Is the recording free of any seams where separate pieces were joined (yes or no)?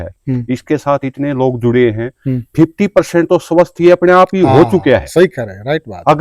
yes